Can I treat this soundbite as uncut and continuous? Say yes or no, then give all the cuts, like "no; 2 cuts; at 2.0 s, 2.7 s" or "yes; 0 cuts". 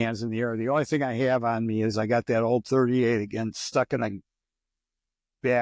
yes; 0 cuts